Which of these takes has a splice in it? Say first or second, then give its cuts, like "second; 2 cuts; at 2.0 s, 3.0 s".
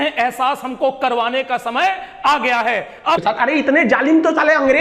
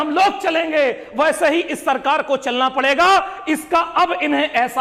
first; 1 cut; at 3.2 s